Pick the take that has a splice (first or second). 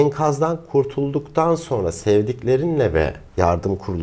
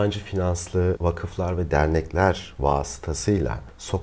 second